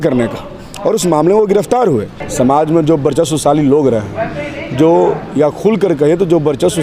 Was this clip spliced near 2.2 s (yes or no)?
yes